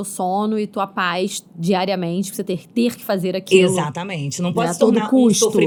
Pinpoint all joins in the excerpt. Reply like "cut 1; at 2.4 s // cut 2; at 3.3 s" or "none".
none